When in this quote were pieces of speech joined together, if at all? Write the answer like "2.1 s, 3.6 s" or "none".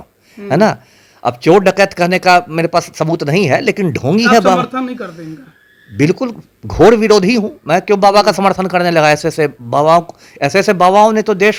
none